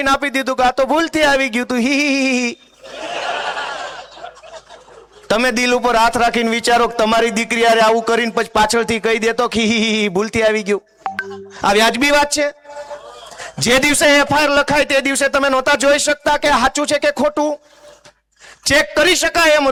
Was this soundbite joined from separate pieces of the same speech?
no; 0 cuts

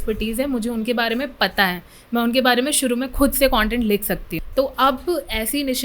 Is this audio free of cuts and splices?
no; 1 cut; at 4.3 s

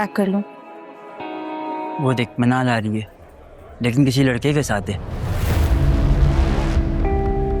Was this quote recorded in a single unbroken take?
no; 1 cut; at 2.0 s

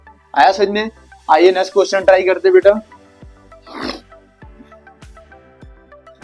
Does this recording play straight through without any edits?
yes; 0 cuts

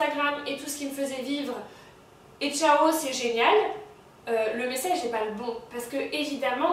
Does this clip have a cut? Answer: no; 0 cuts

